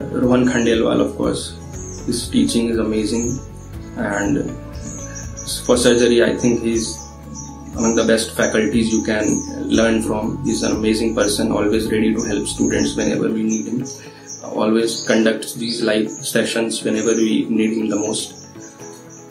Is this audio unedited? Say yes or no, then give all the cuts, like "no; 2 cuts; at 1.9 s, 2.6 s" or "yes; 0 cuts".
yes; 0 cuts